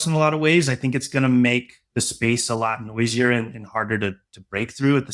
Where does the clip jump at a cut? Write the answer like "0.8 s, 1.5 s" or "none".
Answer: 1.8 s